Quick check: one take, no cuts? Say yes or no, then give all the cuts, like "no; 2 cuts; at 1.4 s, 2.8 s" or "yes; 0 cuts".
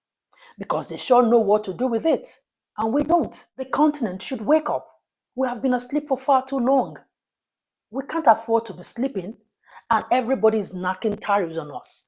no; 1 cut; at 3.7 s